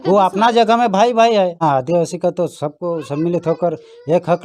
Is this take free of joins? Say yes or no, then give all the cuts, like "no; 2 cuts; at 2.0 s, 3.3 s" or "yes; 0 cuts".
no; 1 cut; at 1.6 s